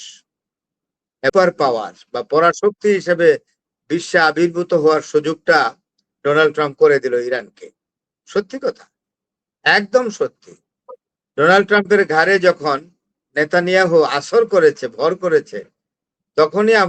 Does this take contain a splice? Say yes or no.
yes